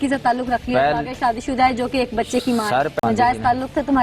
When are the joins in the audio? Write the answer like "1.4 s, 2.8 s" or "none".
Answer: 3.0 s